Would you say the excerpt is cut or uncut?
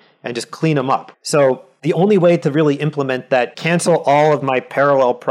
cut